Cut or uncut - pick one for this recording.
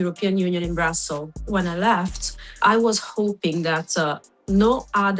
cut